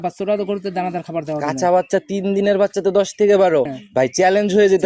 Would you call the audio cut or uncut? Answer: cut